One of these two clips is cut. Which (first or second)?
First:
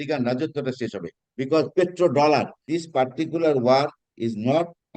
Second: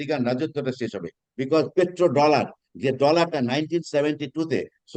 first